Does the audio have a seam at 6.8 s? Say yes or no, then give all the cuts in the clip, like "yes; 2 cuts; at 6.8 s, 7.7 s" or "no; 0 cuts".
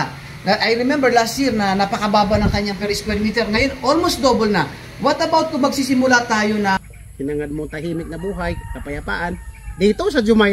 yes; 1 cut; at 6.8 s